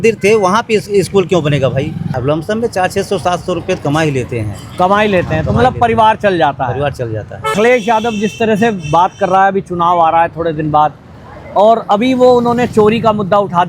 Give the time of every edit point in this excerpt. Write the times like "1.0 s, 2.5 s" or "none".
2.1 s, 7.5 s